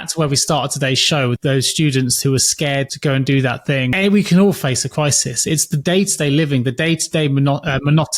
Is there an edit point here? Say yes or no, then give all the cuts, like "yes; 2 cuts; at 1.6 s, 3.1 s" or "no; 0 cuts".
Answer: yes; 3 cuts; at 1.4 s, 2.9 s, 3.9 s